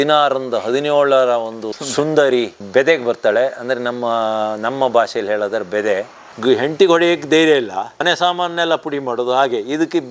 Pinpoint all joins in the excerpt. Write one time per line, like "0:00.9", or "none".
0:06.2
0:07.9

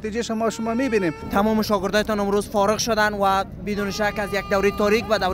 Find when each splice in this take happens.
0:01.2

